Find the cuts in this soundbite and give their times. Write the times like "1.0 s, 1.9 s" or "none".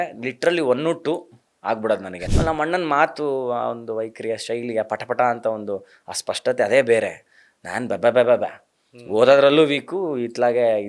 2.2 s